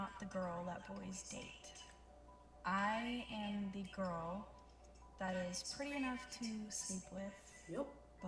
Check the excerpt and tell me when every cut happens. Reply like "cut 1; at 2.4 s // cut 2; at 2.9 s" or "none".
none